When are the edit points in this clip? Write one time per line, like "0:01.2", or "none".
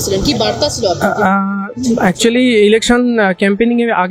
none